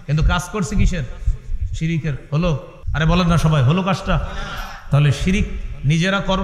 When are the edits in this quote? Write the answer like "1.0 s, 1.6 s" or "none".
2.8 s